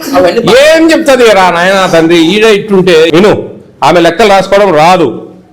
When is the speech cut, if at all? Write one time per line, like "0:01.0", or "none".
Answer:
0:03.1